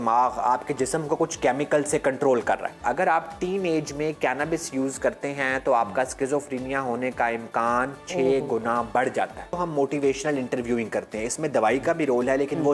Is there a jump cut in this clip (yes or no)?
yes